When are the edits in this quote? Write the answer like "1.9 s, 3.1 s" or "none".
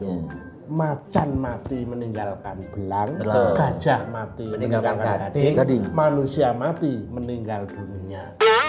none